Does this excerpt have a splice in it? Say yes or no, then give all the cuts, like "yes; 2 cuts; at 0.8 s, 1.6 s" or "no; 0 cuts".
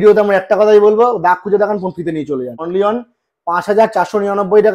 yes; 1 cut; at 2.6 s